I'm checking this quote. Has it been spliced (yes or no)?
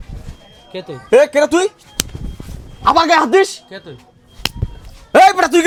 no